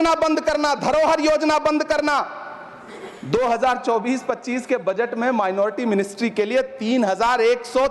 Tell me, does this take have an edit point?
no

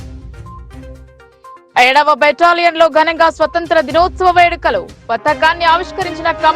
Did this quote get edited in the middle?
yes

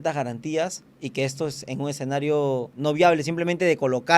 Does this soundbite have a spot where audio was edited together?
yes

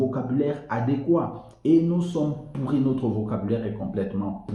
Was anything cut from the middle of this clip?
no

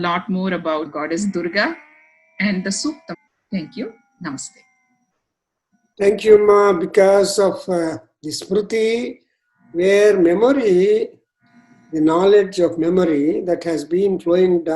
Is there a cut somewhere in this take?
yes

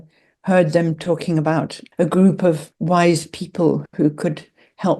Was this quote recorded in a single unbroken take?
no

